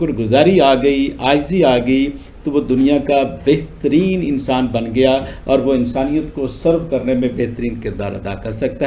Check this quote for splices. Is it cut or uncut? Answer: uncut